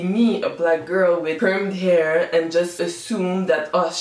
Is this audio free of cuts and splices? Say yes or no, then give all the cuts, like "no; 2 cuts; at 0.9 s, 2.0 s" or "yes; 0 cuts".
yes; 0 cuts